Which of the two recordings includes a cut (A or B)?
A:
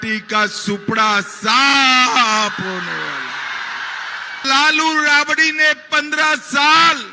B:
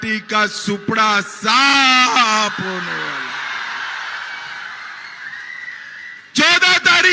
A